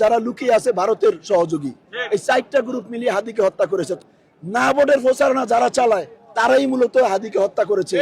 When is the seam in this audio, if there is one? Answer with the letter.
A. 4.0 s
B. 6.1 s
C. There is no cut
A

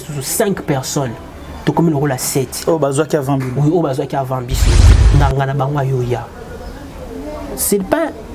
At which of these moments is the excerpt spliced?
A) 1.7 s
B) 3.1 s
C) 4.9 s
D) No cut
C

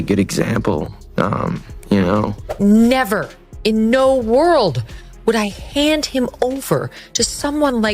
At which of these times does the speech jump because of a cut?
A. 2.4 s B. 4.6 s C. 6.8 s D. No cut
A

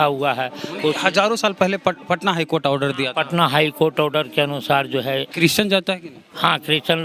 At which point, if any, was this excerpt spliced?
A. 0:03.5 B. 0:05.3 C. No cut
B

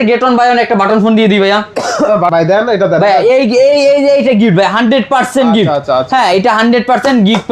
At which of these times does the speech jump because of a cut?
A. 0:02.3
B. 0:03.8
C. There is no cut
A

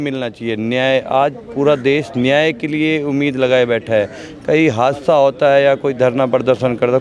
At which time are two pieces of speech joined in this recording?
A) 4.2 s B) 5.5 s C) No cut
C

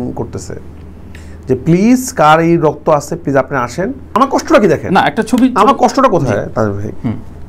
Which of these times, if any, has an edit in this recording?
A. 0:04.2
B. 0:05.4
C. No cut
A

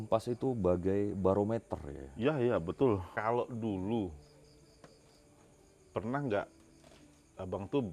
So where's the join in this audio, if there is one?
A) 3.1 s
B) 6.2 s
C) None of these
A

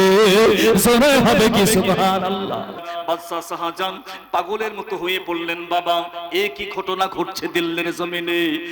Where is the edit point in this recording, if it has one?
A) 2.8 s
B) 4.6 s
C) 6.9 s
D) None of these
A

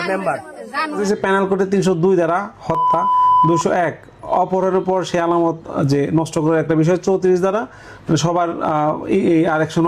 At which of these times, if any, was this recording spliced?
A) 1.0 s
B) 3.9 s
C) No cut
A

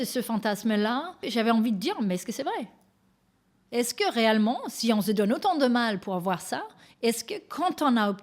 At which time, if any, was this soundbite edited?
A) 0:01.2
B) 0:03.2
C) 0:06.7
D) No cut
A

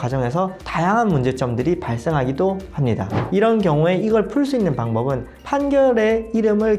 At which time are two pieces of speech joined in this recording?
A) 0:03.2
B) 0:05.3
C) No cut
A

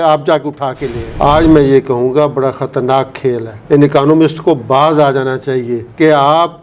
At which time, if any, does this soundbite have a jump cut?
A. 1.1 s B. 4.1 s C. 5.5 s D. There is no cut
A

